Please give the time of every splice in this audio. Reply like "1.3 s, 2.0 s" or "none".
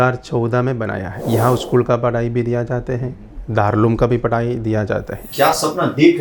1.1 s, 5.2 s